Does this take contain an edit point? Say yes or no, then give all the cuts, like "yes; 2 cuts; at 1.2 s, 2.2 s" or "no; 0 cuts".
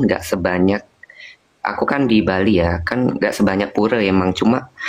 no; 0 cuts